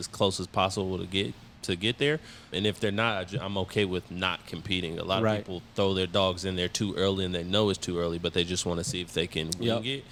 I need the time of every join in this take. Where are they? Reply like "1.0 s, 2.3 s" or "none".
none